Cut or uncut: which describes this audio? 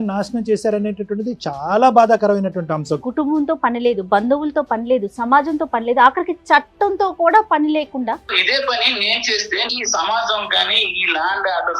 cut